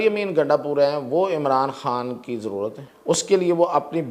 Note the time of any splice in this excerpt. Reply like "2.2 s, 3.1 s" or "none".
2.9 s